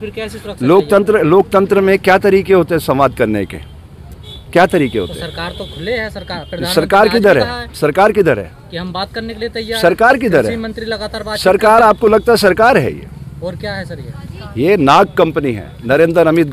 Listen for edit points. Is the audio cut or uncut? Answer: uncut